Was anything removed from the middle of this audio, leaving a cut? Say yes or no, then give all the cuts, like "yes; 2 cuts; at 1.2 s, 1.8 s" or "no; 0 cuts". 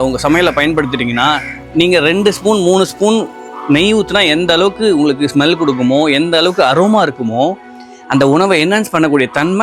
no; 0 cuts